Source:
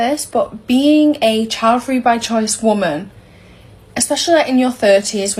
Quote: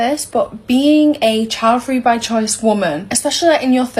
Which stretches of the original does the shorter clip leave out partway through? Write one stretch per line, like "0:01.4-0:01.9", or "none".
0:03.1-0:03.9